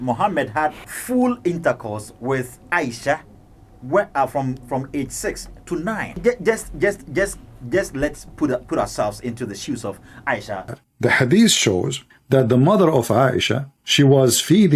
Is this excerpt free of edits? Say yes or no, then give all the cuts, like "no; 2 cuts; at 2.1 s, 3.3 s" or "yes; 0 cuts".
no; 3 cuts; at 0.9 s, 6.2 s, 10.7 s